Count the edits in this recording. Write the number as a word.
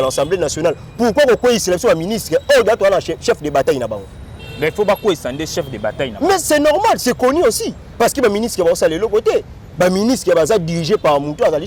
zero